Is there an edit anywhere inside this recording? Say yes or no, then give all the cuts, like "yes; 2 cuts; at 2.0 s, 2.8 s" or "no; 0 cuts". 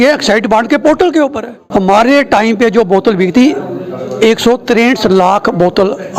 yes; 1 cut; at 1.5 s